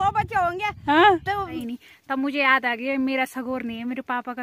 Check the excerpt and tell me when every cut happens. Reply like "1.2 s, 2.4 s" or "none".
1.6 s